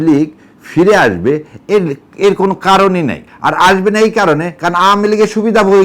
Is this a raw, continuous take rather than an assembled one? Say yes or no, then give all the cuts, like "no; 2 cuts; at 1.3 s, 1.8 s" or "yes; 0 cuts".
no; 1 cut; at 3.3 s